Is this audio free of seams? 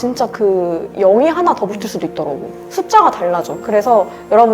yes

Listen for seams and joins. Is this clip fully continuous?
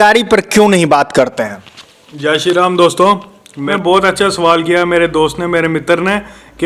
no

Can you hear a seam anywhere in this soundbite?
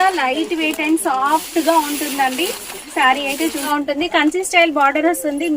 yes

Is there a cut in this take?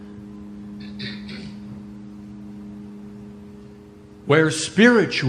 yes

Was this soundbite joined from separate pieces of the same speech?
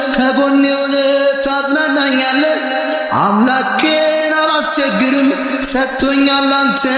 no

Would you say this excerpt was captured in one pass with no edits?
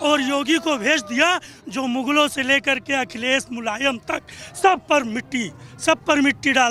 yes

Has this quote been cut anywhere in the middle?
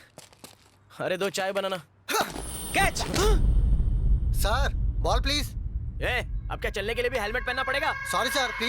no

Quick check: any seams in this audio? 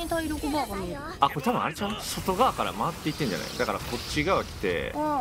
yes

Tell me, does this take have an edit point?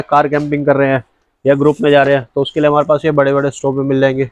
no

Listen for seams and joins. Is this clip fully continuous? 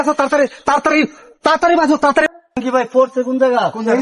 no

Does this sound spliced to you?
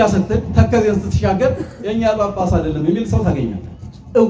no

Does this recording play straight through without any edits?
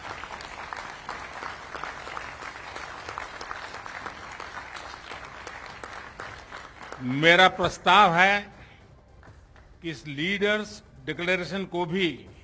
yes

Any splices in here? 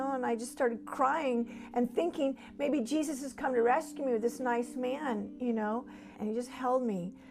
yes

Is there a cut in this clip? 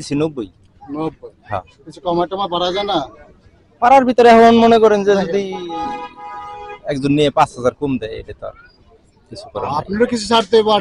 no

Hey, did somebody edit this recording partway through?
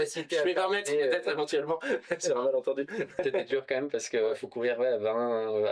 yes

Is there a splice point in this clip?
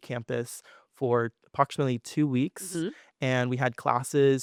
no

